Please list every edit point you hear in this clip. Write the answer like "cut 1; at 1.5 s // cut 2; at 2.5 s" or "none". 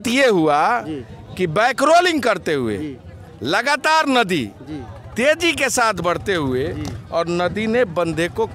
none

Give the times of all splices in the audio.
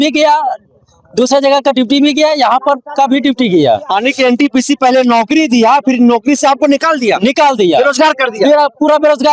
none

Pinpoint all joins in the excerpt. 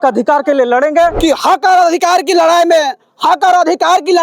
cut 1; at 1.2 s

